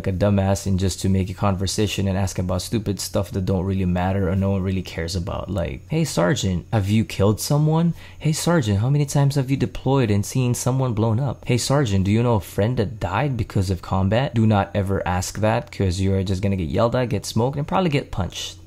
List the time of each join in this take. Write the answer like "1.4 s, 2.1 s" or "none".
5.8 s, 6.6 s, 11.3 s, 14.3 s